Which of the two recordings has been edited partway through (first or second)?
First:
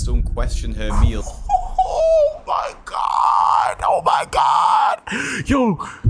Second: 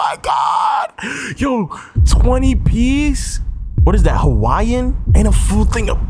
second